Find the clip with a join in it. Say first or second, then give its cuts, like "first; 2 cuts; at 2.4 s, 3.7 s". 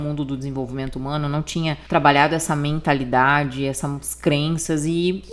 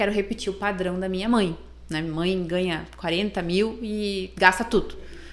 first; 1 cut; at 1.8 s